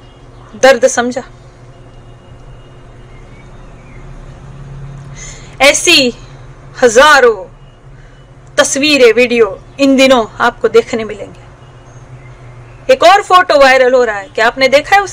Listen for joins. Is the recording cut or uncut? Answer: cut